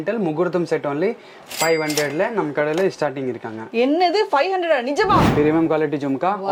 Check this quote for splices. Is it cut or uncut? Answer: cut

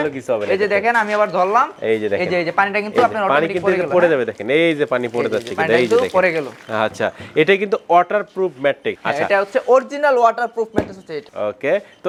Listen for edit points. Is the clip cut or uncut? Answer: uncut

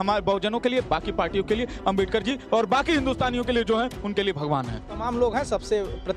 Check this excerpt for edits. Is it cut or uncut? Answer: uncut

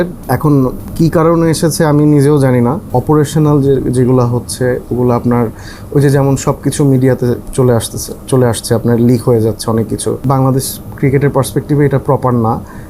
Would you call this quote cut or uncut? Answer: cut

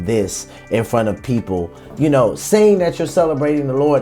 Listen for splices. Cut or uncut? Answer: uncut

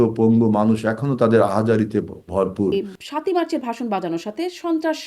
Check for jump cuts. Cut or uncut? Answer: cut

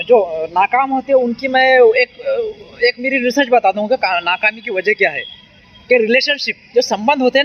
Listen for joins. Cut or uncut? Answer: uncut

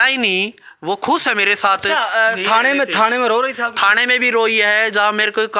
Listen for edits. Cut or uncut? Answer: uncut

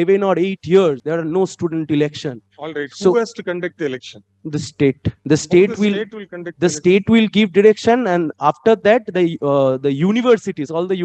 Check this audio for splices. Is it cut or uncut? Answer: cut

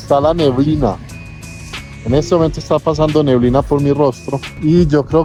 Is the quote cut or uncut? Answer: uncut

